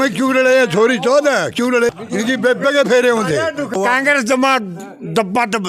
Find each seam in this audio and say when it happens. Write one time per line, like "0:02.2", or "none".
0:01.9
0:04.0